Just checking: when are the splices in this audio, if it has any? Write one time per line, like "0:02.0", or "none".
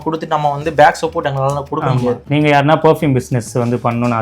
0:02.2